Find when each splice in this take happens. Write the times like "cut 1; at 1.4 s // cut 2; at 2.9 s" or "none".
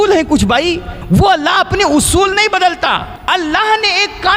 cut 1; at 0.9 s // cut 2; at 3.1 s